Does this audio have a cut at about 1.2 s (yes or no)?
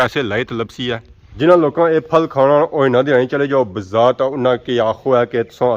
yes